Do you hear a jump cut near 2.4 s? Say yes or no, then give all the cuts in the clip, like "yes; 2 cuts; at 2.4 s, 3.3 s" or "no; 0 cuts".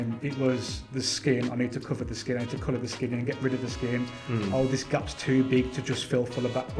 no; 0 cuts